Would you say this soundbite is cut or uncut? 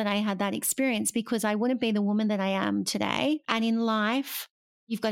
cut